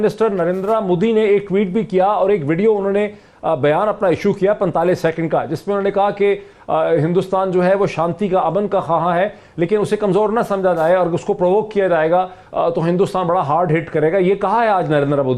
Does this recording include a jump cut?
no; 0 cuts

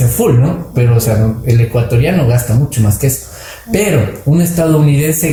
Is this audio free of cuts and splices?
yes; 0 cuts

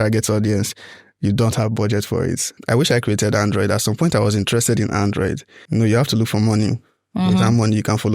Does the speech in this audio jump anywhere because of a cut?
yes; 2 cuts; at 2.6 s, 5.5 s

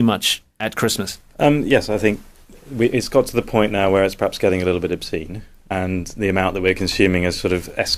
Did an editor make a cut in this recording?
yes; 1 cut; at 1.8 s

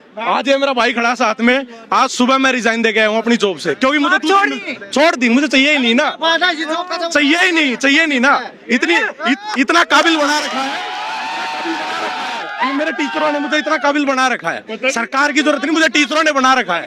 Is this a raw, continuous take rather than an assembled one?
yes; 0 cuts

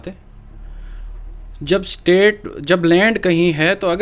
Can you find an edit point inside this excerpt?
no; 0 cuts

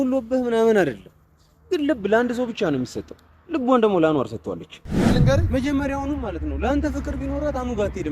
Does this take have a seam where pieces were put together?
yes; 1 cut; at 5.1 s

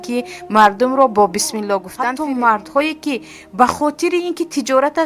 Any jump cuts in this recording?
yes; 1 cut; at 1.9 s

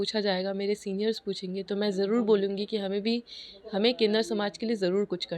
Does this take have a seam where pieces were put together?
no; 0 cuts

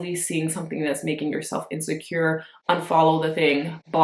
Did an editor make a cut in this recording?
no; 0 cuts

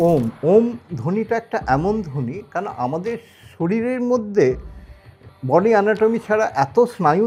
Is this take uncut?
yes; 0 cuts

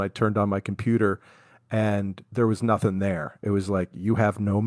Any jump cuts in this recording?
no; 0 cuts

